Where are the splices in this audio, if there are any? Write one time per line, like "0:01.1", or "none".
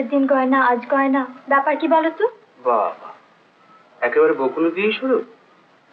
none

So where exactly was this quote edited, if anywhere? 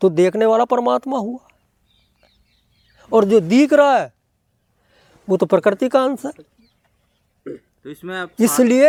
none

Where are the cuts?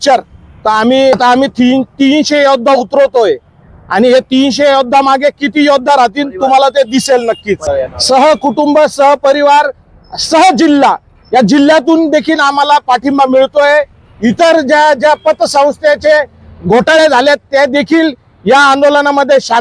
0:01.1
0:07.6

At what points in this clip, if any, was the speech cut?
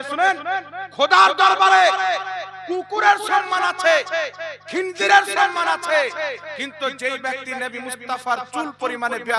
none

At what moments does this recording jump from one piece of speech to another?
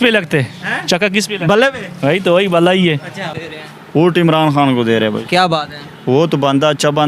0:03.3

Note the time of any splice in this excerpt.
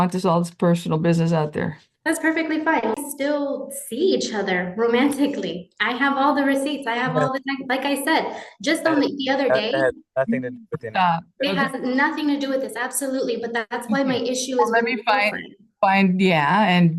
0:02.9

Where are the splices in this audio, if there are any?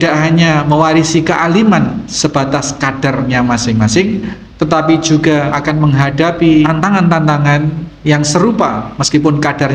0:05.5
0:06.7

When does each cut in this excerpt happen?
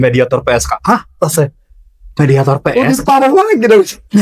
none

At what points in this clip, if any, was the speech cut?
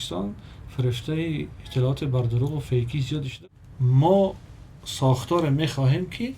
0:03.3

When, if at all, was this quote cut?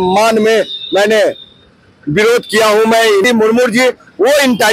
0:03.2

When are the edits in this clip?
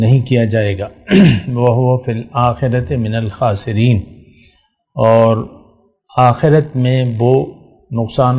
none

